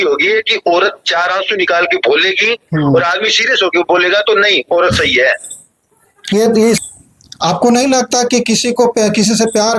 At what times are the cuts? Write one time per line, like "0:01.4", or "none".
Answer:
0:06.8